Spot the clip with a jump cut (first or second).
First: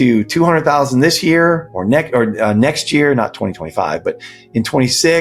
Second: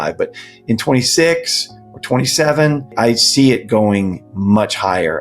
second